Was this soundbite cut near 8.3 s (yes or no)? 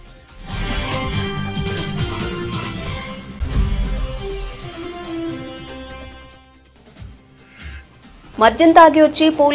yes